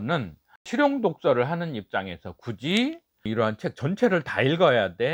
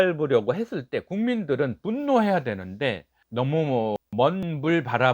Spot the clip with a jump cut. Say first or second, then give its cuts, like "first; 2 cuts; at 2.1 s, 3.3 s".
second; 1 cut; at 4.0 s